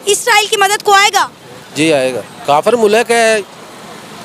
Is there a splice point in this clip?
yes; 1 cut; at 2.3 s

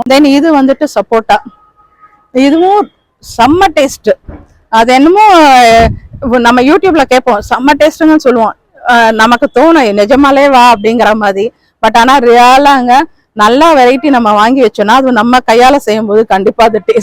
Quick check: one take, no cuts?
yes; 0 cuts

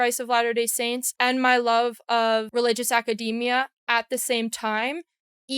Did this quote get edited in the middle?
yes; 2 cuts; at 1.1 s, 2.5 s

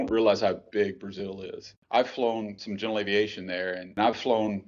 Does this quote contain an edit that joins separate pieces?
no; 0 cuts

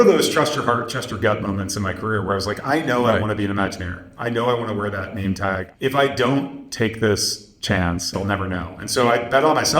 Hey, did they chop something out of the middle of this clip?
yes; 2 cuts; at 5.7 s, 8.1 s

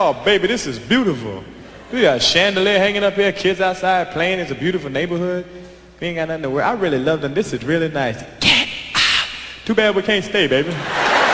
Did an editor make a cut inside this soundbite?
no; 0 cuts

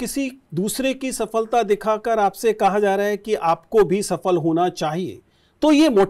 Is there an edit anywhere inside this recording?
no; 0 cuts

